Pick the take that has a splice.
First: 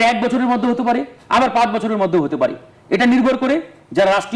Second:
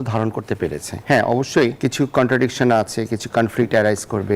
second; 2 cuts; at 0.9 s, 1.8 s

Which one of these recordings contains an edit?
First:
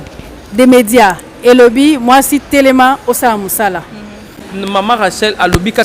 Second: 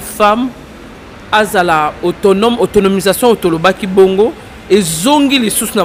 first; 1 cut; at 4.4 s

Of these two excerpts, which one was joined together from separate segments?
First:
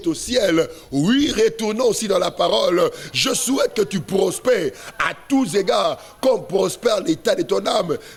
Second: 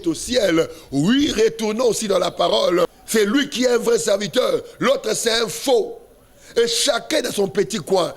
second; 1 cut; at 3.0 s

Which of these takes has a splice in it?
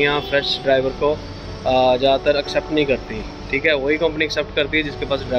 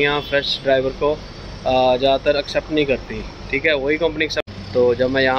second; 1 cut; at 4.4 s

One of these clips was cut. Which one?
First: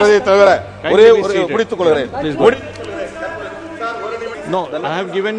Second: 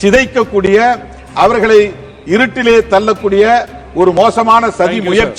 first; 1 cut; at 4.3 s

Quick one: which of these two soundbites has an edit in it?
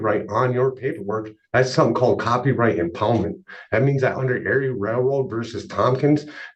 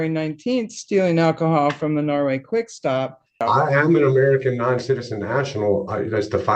second; 1 cut; at 3.4 s

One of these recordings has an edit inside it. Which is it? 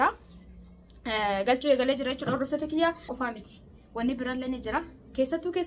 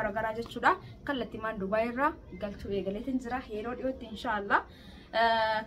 first; 1 cut; at 3.1 s

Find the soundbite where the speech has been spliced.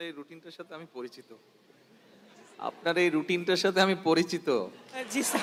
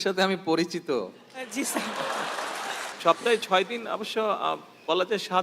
second; 1 cut; at 2.9 s

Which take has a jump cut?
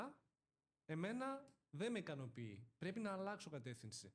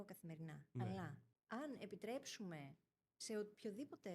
second; 1 cut; at 1.3 s

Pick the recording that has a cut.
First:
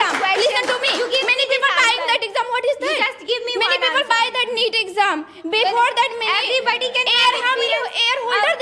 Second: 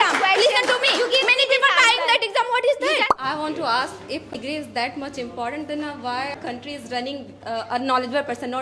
second; 3 cuts; at 3.1 s, 4.4 s, 6.4 s

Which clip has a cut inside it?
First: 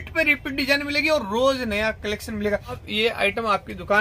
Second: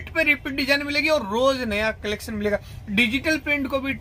first; 1 cut; at 2.8 s

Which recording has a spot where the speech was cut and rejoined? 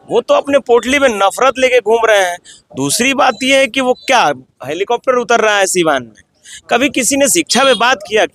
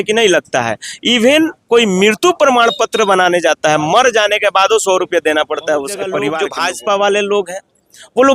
second; 1 cut; at 6.3 s

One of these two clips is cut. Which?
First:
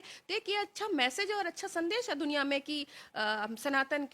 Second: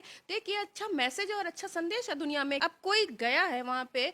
second; 1 cut; at 2.6 s

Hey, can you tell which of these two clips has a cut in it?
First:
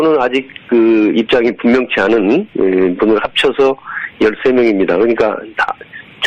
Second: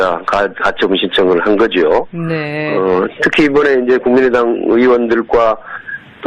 second; 1 cut; at 4.3 s

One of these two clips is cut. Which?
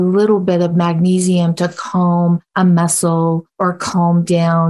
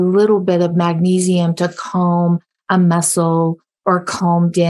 first; 2 cuts; at 2.5 s, 3.5 s

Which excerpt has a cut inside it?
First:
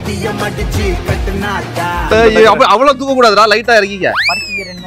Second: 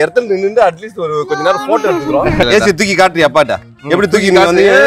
second; 1 cut; at 2.4 s

